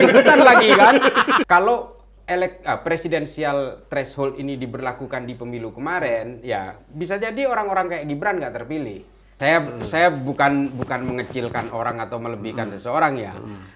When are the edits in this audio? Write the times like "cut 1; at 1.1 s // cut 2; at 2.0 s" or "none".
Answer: cut 1; at 1.4 s // cut 2; at 9.3 s